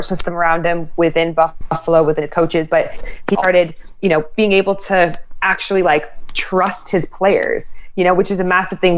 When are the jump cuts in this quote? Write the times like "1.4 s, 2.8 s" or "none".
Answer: none